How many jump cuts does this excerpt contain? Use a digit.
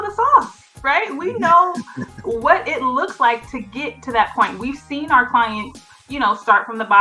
0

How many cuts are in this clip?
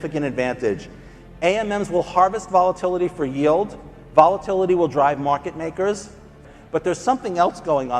1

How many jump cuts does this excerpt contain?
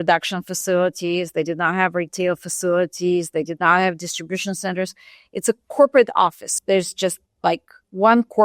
1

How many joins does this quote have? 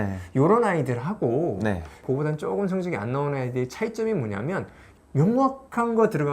1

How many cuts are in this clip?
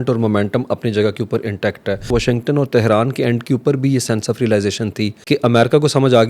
2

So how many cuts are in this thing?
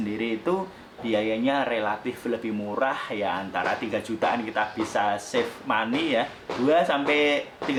0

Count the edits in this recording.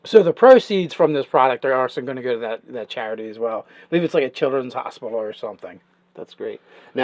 1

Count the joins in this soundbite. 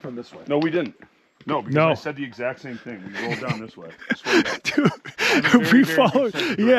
0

